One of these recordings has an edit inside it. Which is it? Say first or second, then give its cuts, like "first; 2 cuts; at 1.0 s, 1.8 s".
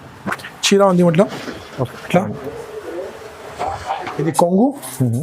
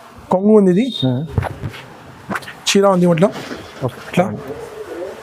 first; 1 cut; at 4.2 s